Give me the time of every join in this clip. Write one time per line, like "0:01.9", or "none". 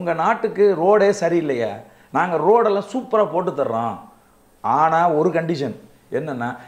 none